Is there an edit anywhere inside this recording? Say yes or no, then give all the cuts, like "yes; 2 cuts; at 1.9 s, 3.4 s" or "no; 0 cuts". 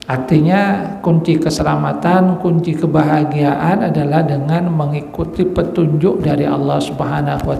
no; 0 cuts